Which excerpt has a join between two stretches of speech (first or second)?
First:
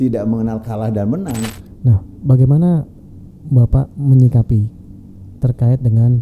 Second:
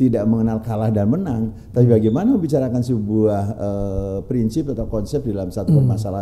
first